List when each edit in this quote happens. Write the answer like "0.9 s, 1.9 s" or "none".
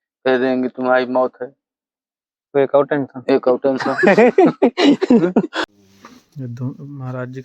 5.8 s